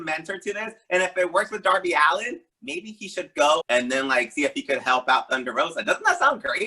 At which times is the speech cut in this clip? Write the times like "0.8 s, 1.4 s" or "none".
3.6 s